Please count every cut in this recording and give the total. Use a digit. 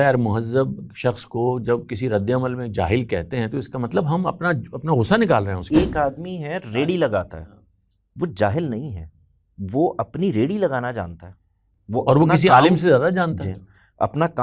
1